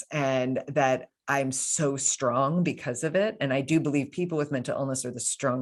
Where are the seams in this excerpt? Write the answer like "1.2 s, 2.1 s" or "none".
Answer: none